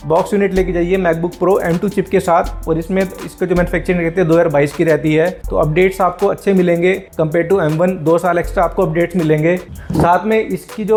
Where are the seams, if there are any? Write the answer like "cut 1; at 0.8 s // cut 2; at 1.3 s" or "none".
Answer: none